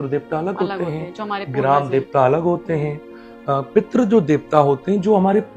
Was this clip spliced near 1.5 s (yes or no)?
no